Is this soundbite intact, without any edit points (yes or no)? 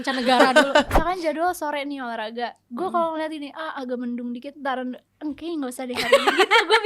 no